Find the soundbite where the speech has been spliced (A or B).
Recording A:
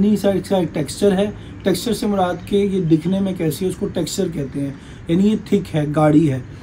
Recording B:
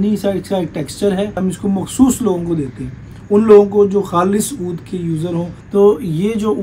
B